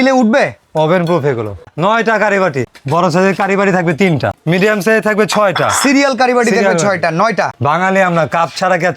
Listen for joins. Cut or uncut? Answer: cut